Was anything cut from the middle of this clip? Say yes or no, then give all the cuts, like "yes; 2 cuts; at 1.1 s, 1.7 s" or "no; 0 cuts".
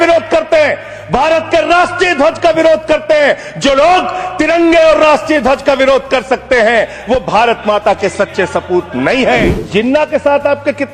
yes; 1 cut; at 9.6 s